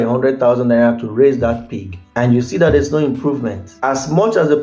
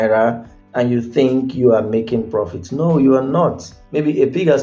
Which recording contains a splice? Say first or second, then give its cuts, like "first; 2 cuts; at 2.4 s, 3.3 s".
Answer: second; 1 cut; at 3.7 s